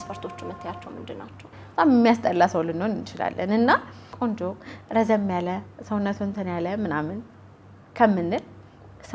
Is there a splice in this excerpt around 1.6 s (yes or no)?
yes